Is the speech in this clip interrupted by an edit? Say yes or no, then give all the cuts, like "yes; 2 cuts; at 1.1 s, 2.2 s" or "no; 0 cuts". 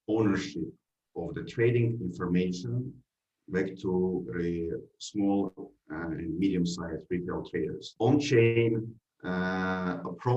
yes; 1 cut; at 7.9 s